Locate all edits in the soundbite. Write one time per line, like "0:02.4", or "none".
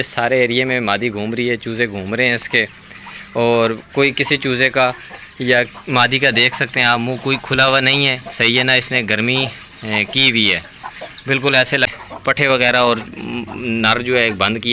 0:11.9